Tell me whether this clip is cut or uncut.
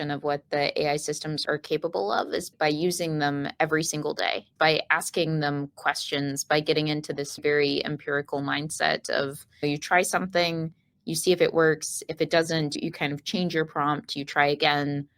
uncut